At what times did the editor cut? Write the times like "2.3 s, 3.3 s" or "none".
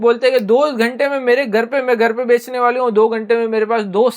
none